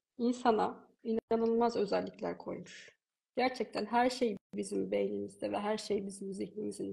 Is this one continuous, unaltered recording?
yes; 0 cuts

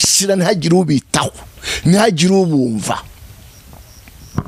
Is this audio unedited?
yes; 0 cuts

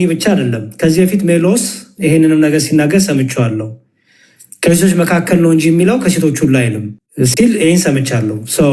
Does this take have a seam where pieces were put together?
no; 0 cuts

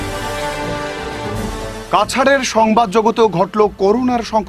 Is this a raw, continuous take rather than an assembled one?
yes; 0 cuts

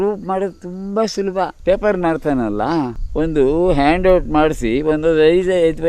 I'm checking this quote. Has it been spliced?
yes; 2 cuts; at 1.6 s, 3.0 s

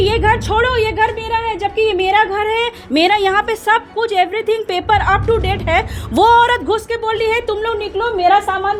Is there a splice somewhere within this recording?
no; 0 cuts

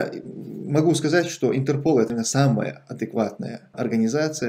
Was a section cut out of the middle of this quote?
yes; 2 cuts; at 2.1 s, 3.7 s

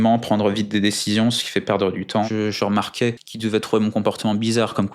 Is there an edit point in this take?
yes; 2 cuts; at 2.3 s, 3.3 s

